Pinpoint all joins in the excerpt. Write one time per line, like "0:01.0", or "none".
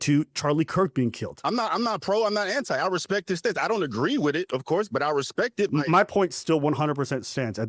0:01.3
0:05.7